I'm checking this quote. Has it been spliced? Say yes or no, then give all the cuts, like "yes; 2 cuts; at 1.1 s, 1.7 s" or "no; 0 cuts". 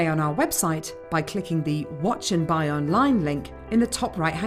no; 0 cuts